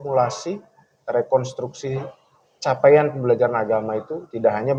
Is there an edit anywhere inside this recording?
no; 0 cuts

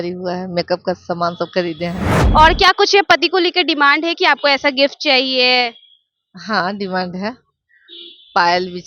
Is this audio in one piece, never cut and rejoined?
no; 1 cut; at 2.1 s

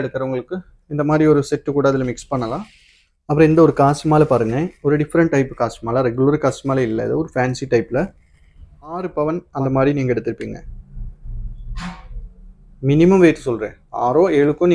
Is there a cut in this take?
yes; 2 cuts; at 3.3 s, 9.0 s

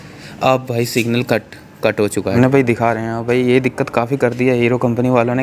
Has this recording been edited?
yes; 1 cut; at 2.3 s

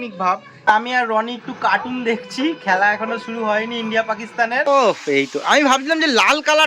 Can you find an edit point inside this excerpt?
yes; 2 cuts; at 0.7 s, 4.7 s

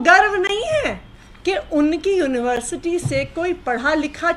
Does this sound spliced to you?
no; 0 cuts

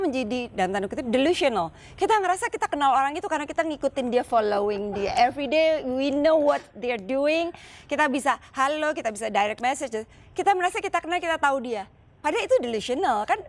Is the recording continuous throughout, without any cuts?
yes; 0 cuts

